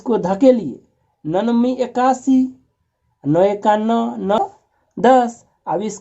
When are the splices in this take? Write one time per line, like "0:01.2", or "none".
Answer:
0:04.4